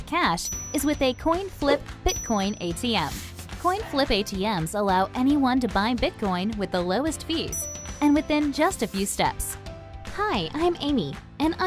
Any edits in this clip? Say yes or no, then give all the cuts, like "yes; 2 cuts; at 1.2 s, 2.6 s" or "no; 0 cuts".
yes; 1 cut; at 5.7 s